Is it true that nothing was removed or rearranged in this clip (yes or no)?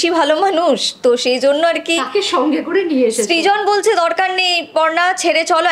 yes